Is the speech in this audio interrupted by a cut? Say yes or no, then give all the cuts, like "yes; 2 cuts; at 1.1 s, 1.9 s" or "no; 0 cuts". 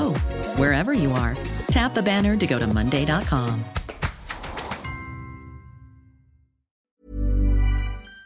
yes; 1 cut; at 6.9 s